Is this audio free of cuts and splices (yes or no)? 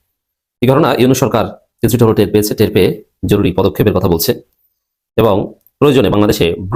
yes